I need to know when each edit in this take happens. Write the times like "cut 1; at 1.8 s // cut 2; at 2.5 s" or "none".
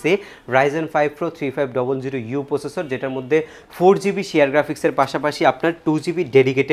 none